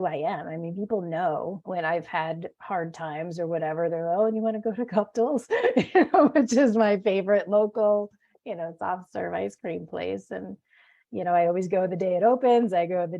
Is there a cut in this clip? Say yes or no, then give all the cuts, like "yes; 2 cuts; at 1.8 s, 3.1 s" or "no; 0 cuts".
yes; 1 cut; at 1.6 s